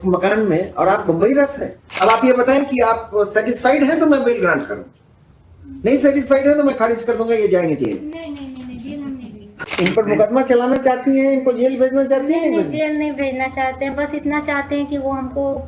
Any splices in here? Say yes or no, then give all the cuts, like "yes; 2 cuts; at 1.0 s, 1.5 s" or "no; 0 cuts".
yes; 2 cuts; at 1.8 s, 9.5 s